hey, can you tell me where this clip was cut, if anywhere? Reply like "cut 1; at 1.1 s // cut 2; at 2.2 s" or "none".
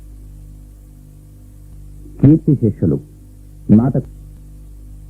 cut 1; at 1.7 s // cut 2; at 4.0 s